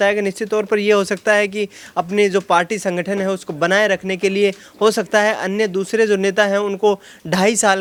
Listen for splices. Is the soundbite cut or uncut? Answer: uncut